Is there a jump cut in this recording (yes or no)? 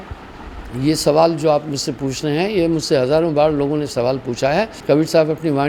yes